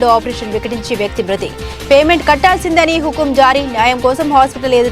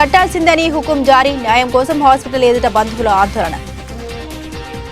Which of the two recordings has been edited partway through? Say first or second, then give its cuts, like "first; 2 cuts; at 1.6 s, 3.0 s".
second; 1 cut; at 3.6 s